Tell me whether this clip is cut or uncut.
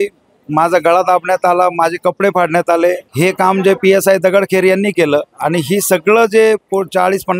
cut